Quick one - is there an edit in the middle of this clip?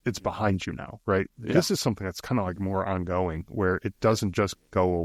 no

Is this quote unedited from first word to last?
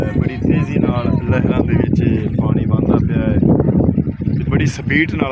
yes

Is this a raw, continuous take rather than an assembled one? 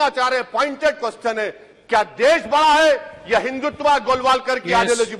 yes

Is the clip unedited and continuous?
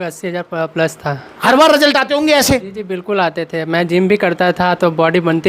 no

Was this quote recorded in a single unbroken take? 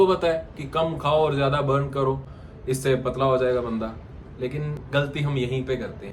yes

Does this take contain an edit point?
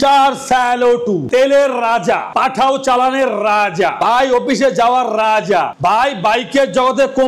no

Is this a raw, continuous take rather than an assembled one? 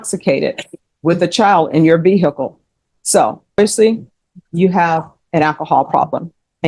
no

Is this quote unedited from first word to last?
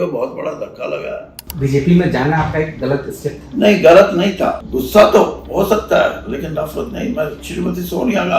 no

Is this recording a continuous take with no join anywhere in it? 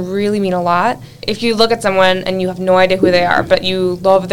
no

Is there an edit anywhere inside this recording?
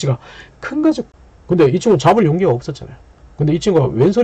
yes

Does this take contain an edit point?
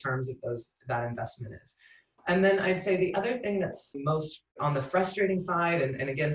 yes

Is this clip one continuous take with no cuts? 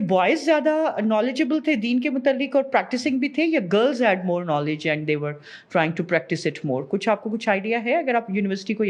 yes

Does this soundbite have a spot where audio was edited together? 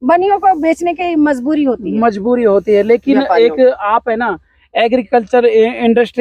no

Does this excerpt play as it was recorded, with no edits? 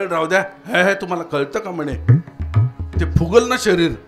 yes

